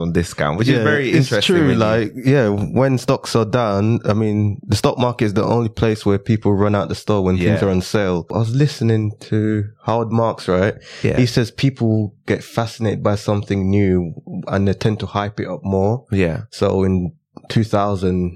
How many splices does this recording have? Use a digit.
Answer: 1